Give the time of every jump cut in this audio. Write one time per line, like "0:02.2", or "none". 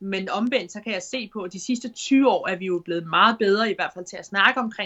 none